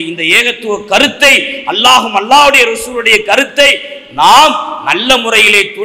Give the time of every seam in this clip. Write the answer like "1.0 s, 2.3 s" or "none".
none